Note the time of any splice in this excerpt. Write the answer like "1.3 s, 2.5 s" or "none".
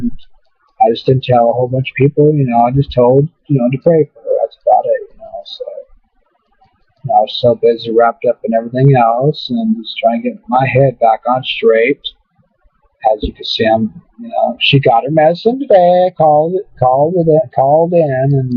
none